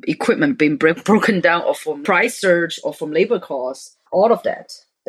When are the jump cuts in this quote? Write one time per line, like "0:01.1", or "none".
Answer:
0:02.0
0:04.0